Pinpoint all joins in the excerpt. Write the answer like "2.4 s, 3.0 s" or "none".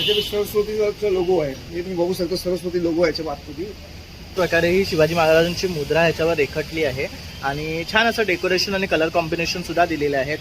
4.4 s